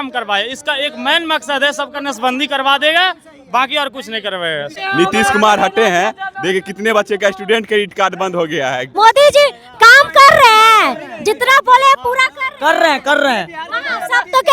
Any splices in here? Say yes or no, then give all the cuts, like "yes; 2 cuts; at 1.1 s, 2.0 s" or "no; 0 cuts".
yes; 2 cuts; at 4.7 s, 8.9 s